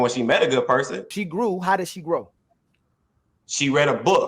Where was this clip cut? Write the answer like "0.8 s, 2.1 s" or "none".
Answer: 1.2 s